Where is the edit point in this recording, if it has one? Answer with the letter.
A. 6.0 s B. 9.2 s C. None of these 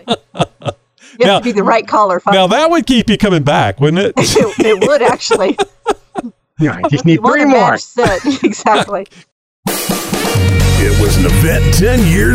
B